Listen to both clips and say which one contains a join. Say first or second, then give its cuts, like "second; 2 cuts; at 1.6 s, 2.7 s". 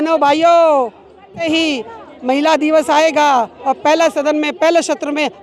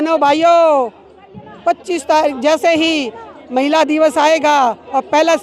first; 1 cut; at 1.4 s